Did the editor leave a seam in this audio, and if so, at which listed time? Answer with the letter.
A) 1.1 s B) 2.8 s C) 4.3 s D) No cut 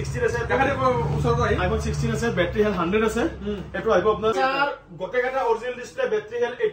C